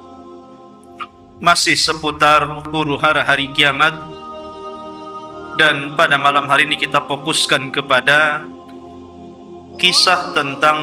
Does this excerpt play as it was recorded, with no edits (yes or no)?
no